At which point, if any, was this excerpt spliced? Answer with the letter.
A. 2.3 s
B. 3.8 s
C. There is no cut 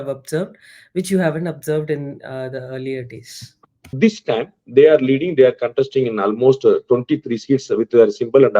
B